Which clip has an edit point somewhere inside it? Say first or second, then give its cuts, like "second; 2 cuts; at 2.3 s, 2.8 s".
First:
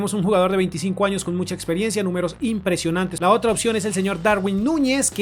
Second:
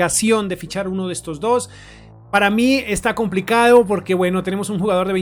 first; 1 cut; at 3.1 s